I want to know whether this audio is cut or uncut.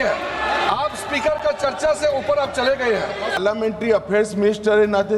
cut